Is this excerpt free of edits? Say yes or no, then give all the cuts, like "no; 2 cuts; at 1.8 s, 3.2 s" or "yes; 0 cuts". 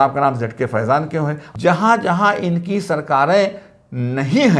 no; 1 cut; at 1.4 s